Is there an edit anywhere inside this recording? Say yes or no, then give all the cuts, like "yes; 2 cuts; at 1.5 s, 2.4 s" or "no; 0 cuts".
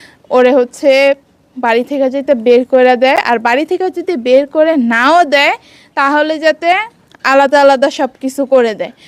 no; 0 cuts